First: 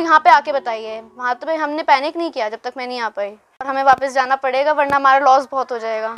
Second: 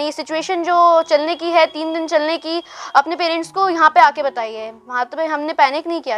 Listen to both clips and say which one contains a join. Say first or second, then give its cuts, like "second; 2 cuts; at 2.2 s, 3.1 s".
first; 1 cut; at 3.7 s